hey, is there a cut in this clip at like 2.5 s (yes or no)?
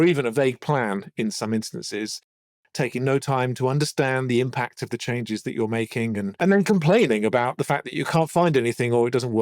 no